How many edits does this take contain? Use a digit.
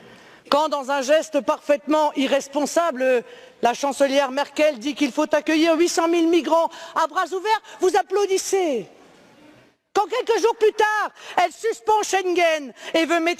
1